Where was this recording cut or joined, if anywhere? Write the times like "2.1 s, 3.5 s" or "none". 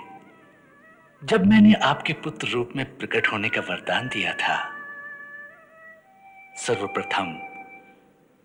none